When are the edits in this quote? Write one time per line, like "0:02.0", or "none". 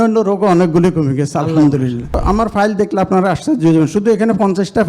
0:02.2